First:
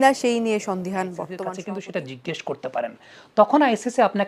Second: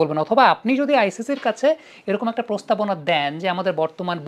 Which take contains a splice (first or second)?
first